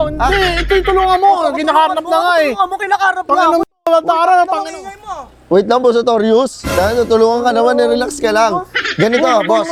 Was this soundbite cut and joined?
no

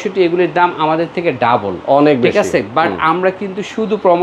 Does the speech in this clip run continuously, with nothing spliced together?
yes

